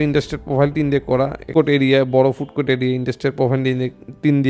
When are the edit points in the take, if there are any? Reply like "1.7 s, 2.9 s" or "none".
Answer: 1.5 s